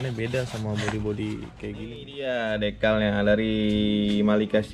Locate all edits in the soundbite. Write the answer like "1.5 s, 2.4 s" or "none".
2.0 s